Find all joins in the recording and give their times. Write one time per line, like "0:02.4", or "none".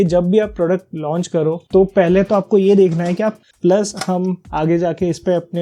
0:03.4